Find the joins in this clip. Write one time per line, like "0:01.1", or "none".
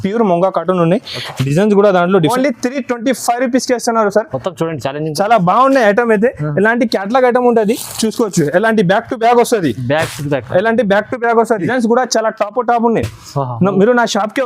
0:02.3
0:11.7